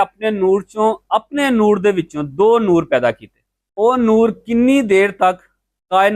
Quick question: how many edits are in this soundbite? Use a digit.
0